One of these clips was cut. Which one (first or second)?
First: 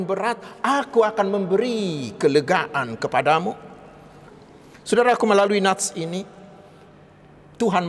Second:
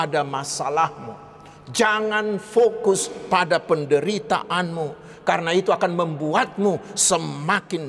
first